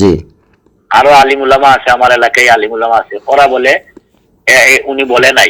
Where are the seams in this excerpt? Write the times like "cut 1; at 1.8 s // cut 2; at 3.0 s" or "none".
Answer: none